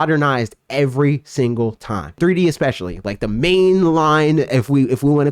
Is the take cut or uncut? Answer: cut